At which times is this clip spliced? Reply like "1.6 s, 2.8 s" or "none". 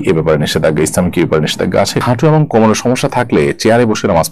2.0 s

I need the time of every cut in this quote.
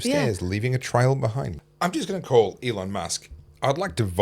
1.5 s

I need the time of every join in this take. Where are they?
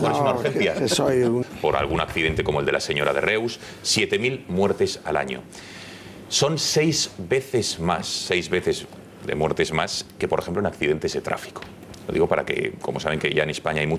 none

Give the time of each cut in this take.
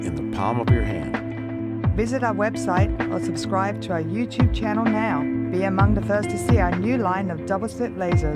6.7 s

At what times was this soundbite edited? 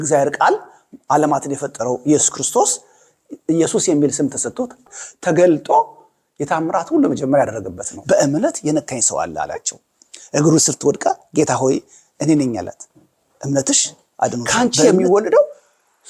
14.8 s

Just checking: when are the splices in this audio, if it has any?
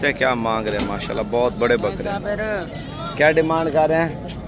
none

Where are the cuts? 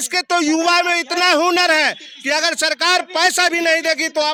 none

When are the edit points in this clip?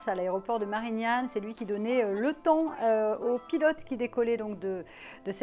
none

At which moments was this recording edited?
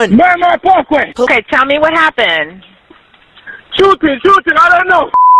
1.3 s

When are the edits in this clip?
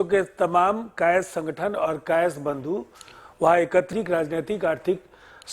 3.9 s

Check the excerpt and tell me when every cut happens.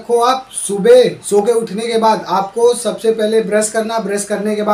none

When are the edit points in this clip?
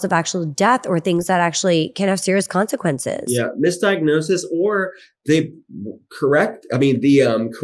none

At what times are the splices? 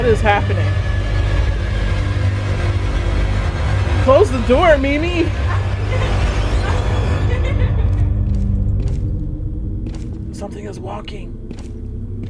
none

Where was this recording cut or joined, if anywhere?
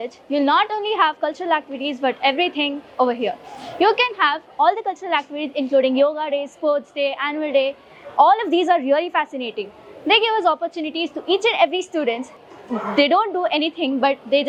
none

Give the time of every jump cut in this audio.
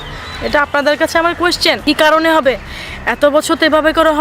1.8 s

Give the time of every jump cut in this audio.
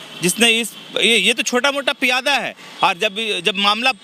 none

